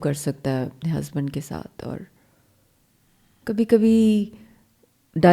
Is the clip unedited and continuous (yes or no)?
yes